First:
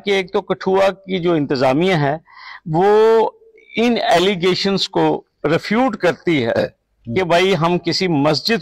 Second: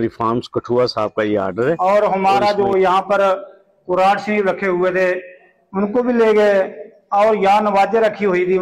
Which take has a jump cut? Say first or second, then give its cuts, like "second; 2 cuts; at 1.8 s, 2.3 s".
second; 1 cut; at 1.8 s